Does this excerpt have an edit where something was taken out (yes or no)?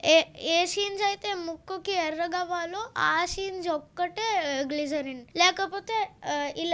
yes